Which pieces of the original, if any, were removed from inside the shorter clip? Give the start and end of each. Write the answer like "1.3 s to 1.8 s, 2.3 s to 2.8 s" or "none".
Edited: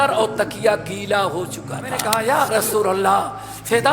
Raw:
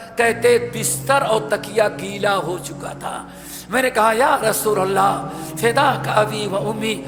3.1 s to 3.9 s